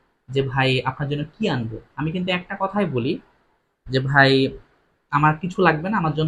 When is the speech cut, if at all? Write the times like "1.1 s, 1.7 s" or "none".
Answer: none